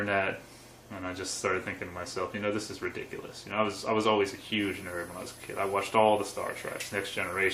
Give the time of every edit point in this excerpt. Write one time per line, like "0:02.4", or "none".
none